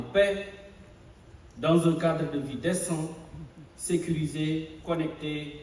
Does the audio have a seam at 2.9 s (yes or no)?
no